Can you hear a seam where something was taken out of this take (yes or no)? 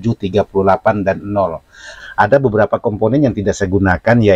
yes